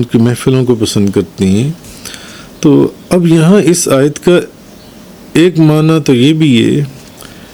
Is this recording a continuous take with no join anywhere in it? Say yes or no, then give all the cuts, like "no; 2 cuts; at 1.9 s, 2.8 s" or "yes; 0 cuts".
yes; 0 cuts